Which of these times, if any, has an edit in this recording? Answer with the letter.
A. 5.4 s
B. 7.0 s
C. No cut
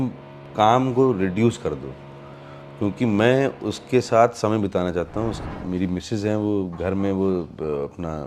A